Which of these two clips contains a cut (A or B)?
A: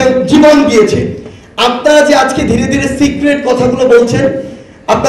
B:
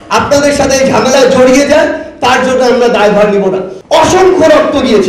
B